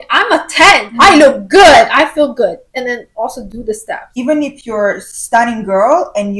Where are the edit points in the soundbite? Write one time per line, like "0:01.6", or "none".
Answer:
0:00.9
0:04.1